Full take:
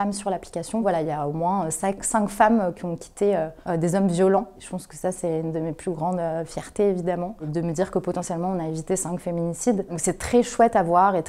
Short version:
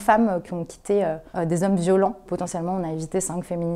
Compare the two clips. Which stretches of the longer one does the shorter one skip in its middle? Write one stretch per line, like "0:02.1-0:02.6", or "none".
0:04.6-0:08.0